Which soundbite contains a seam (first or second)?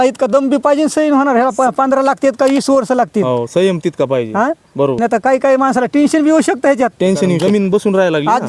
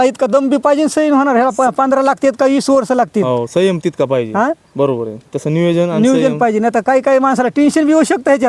first